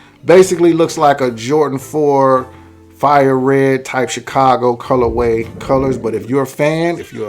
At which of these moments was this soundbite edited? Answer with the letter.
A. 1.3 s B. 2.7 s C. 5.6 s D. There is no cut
C